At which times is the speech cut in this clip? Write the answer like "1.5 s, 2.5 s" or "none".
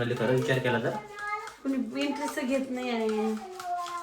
none